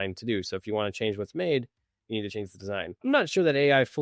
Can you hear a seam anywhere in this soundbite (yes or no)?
yes